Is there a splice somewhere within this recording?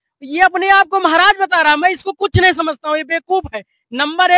no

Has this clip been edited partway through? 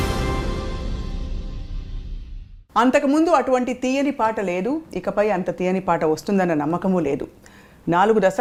no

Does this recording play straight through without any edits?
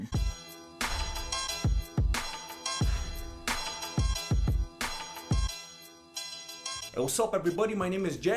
yes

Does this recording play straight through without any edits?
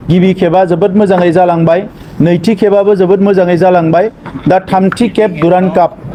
yes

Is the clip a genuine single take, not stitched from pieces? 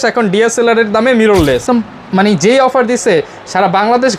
no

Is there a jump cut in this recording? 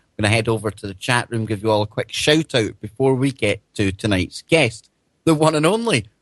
yes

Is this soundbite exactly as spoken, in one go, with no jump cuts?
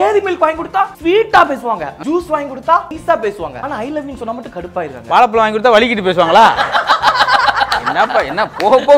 no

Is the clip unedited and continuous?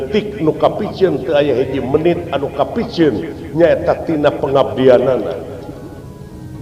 yes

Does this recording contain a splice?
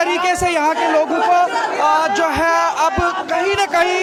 no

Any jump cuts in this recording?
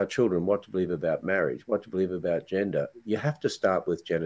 no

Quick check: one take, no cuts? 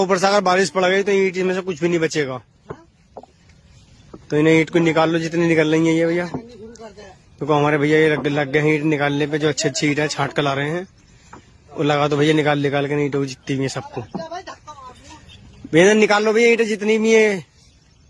yes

